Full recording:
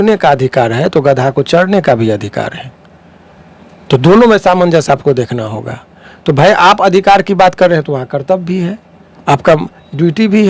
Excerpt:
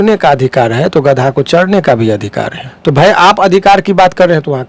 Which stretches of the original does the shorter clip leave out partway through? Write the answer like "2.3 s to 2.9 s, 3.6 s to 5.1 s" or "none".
2.6 s to 6.0 s